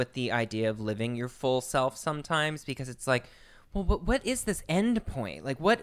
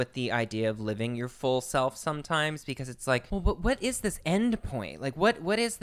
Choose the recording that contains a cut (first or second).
second